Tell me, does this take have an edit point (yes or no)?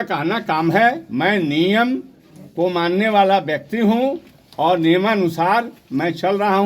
no